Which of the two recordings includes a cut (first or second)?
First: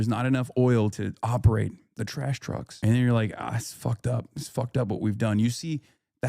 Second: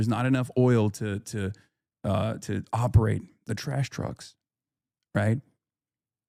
first